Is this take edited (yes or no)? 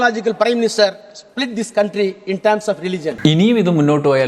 yes